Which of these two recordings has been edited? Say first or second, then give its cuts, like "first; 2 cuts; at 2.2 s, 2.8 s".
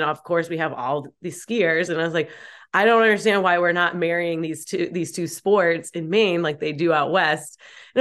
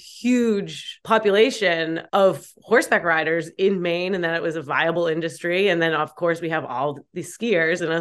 second; 2 cuts; at 0.9 s, 2.0 s